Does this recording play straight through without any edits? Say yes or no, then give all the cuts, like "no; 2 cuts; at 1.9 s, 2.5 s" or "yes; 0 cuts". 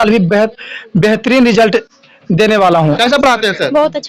no; 1 cut; at 3.0 s